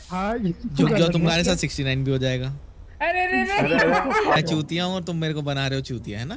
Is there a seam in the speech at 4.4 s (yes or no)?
yes